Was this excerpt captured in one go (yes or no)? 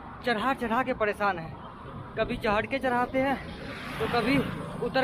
yes